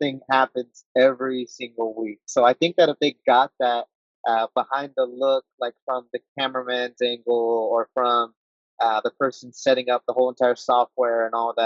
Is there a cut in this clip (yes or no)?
no